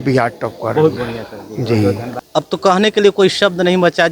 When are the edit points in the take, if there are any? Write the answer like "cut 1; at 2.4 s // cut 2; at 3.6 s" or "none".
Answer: cut 1; at 2.2 s